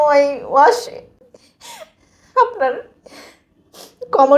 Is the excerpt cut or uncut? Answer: uncut